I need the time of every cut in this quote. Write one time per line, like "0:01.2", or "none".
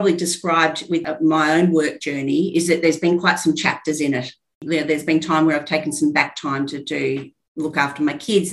0:01.0
0:04.6